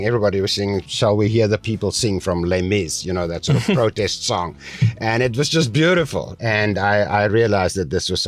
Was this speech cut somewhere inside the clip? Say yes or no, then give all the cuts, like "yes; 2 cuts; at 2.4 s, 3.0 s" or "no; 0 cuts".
yes; 2 cuts; at 0.9 s, 6.3 s